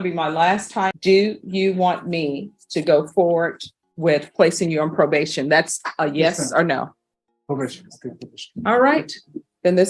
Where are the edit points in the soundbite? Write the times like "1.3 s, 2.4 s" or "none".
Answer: 1.0 s